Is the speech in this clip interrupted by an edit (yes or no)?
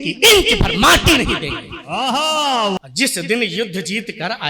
yes